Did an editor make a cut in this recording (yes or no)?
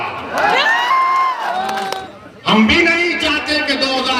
yes